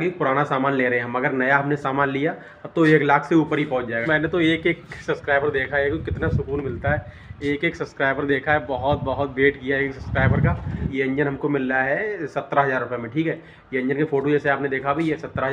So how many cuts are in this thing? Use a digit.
2